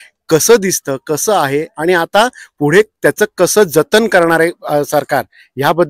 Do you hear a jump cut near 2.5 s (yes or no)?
no